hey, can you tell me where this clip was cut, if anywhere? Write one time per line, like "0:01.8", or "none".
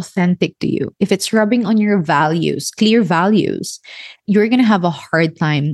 0:04.2